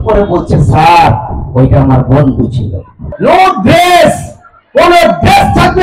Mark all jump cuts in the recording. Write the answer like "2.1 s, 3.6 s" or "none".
3.1 s